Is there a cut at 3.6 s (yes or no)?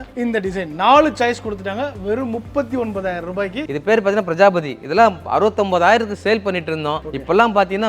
yes